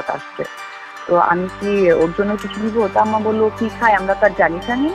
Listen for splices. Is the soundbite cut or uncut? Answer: uncut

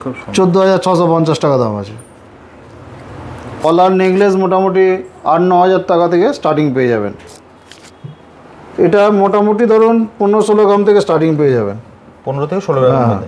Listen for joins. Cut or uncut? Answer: cut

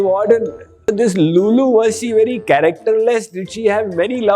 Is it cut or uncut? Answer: cut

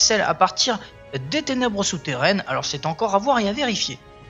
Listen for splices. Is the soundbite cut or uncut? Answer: cut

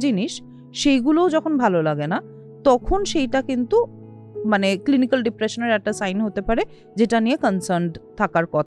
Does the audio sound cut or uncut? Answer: uncut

